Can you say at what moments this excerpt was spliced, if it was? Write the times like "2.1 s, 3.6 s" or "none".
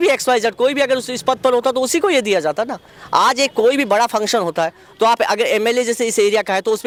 none